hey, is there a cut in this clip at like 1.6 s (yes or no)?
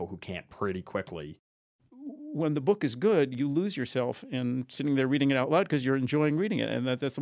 yes